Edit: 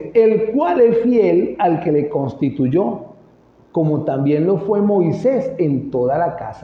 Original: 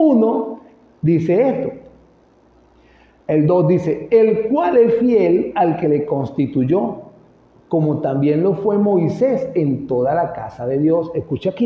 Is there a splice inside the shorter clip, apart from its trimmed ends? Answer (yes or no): no